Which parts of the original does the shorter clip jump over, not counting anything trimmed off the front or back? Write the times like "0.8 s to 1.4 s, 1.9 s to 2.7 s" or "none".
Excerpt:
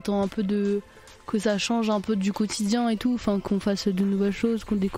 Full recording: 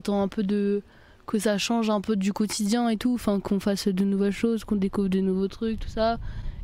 none